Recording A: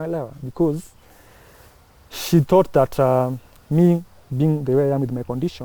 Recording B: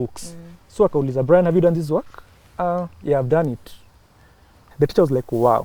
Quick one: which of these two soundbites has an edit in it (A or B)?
B